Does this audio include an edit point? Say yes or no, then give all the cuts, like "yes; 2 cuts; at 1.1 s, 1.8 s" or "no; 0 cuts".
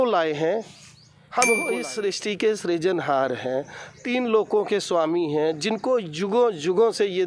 yes; 1 cut; at 1.7 s